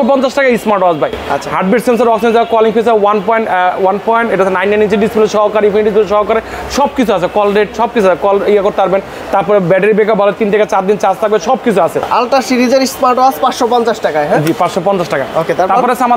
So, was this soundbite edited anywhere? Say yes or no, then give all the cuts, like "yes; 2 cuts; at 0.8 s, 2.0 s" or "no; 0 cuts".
no; 0 cuts